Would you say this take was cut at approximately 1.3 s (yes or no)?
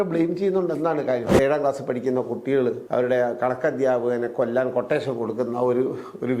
yes